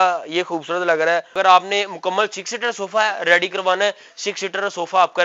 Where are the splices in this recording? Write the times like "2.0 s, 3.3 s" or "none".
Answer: 1.3 s